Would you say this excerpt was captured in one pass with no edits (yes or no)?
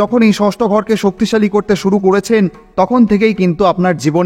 no